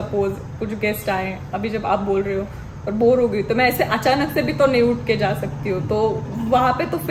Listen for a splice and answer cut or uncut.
uncut